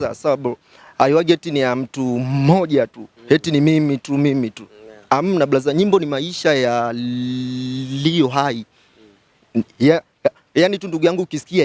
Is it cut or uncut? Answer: uncut